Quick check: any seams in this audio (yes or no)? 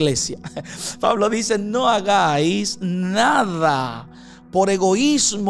no